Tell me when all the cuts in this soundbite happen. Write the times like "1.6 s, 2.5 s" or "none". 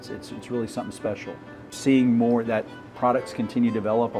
1.7 s